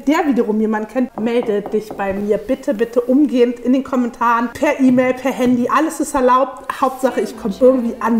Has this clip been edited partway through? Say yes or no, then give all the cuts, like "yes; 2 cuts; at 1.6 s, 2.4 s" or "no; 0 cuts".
yes; 2 cuts; at 1.1 s, 4.5 s